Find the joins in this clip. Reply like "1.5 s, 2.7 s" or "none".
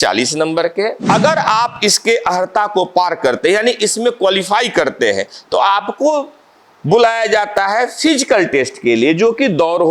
1.0 s

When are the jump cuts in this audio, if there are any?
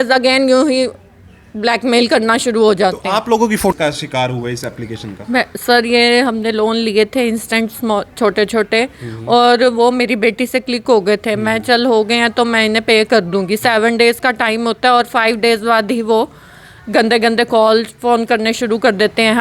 3.7 s

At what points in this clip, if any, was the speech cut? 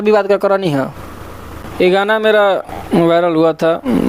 none

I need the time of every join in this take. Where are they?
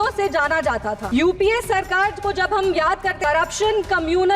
1.0 s, 3.2 s

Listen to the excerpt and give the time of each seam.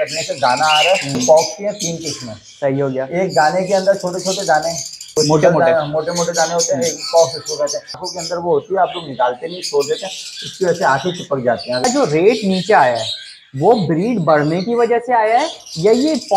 1.2 s, 4.9 s, 8.0 s, 11.9 s

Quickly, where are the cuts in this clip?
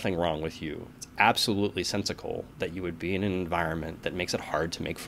none

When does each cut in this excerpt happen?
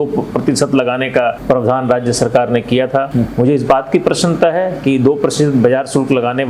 1.4 s, 3.1 s

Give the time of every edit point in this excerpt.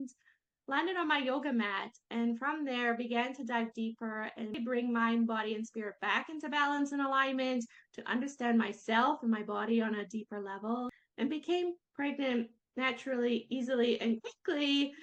4.6 s, 10.9 s

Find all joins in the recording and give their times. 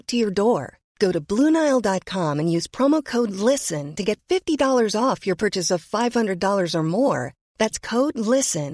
none

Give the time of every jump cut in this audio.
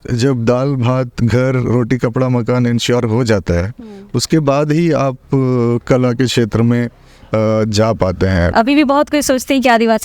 8.5 s

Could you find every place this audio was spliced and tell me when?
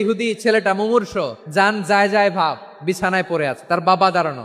1.4 s

